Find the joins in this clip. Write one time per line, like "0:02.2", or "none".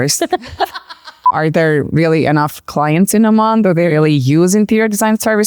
0:01.3